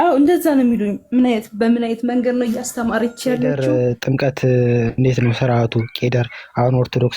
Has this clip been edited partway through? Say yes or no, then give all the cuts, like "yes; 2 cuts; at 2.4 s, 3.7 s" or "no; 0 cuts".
yes; 1 cut; at 3.6 s